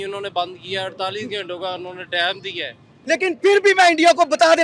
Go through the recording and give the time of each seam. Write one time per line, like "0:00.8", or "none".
0:03.0